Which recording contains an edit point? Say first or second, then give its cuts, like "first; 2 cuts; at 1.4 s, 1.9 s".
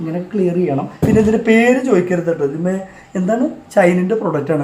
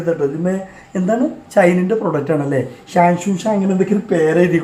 first; 1 cut; at 0.9 s